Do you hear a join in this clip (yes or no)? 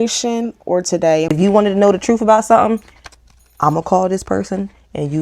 yes